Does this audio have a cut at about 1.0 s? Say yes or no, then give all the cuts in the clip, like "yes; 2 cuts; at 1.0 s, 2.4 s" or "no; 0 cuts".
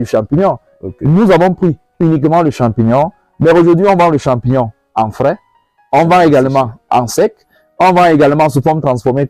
no; 0 cuts